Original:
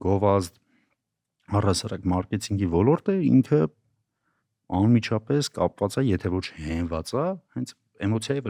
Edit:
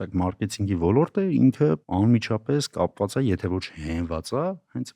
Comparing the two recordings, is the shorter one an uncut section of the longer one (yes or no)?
no